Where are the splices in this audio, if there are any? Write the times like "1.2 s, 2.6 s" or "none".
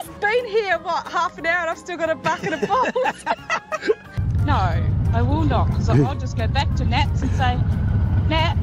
4.1 s